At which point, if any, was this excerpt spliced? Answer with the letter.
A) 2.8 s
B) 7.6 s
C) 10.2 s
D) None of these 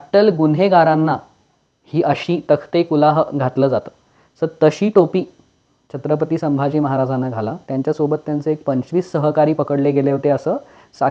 D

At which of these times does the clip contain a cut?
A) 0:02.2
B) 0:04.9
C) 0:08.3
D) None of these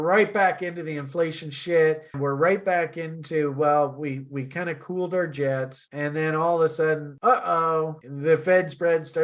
A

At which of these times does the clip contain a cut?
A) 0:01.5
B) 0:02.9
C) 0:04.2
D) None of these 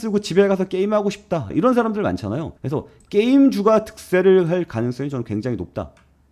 A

